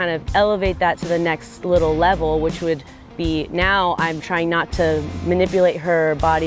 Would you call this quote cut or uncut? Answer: cut